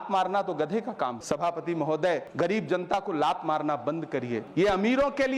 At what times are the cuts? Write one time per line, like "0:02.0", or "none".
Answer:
none